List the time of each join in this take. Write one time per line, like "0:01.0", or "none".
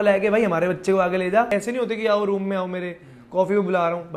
0:01.5